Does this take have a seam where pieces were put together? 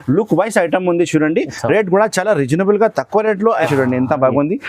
yes; 1 cut; at 3.6 s

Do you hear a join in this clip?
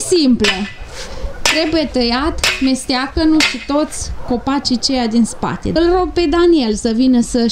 yes; 1 cut; at 5.7 s

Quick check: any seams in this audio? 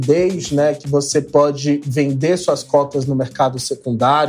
no; 0 cuts

